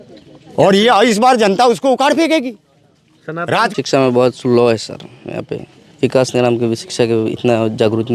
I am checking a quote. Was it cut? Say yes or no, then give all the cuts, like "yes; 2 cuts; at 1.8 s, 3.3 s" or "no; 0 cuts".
yes; 1 cut; at 3.7 s